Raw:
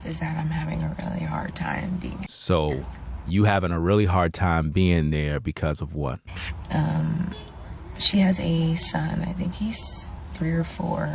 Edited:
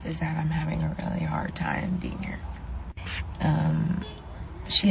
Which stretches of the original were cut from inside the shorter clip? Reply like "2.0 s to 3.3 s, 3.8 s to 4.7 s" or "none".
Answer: 2.5 s to 5.8 s